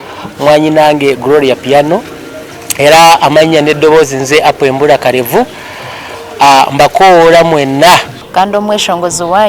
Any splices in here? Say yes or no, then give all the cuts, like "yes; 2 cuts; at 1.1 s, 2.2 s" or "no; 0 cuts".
yes; 1 cut; at 8.2 s